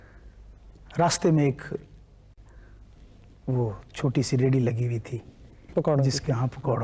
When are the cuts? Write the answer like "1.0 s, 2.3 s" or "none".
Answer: none